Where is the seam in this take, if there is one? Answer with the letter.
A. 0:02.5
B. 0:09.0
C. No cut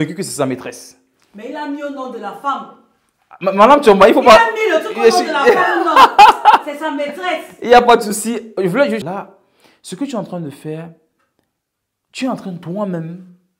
B